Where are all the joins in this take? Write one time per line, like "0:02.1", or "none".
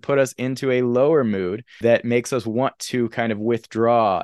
0:01.7